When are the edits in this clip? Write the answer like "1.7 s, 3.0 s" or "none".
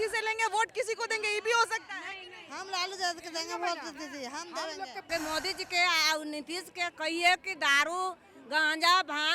5.1 s